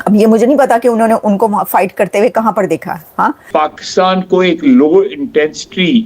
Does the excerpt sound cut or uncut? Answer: cut